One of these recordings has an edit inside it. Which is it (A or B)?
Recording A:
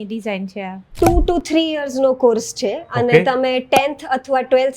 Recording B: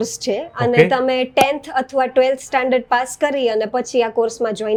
A